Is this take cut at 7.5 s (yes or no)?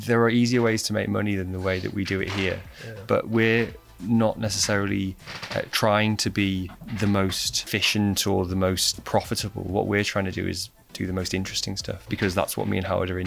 yes